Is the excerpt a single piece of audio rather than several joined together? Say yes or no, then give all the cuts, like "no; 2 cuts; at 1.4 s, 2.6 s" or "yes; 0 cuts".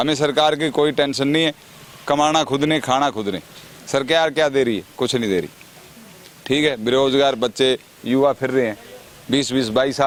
yes; 0 cuts